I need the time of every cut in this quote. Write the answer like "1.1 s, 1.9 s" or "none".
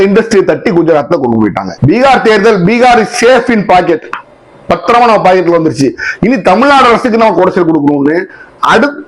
1.7 s